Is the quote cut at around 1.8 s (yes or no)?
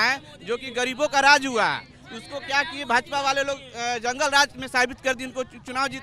no